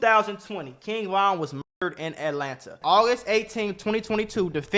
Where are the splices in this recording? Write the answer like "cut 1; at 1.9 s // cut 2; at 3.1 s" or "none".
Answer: cut 1; at 2.8 s